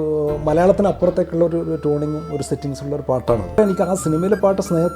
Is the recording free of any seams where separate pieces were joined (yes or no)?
no